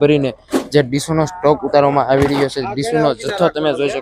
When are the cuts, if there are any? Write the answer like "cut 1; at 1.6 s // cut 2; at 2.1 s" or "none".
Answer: none